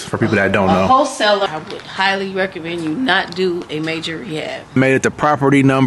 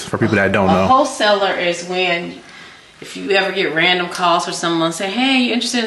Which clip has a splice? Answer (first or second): first